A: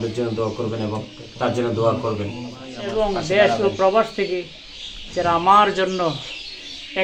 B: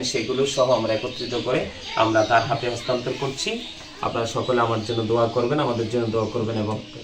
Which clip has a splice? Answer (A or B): A